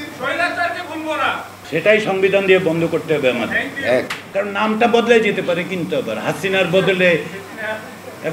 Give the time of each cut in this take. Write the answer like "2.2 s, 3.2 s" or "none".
1.5 s, 4.2 s